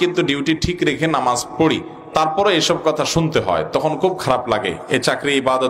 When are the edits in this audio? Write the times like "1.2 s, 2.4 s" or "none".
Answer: none